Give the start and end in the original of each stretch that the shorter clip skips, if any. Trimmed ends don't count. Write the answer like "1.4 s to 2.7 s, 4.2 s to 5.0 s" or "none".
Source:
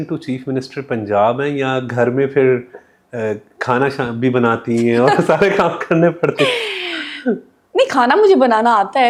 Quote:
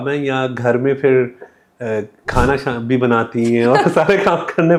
none